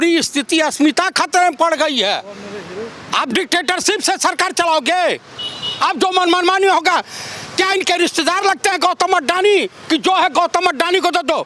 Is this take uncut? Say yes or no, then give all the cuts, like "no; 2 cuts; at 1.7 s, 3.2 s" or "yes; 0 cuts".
yes; 0 cuts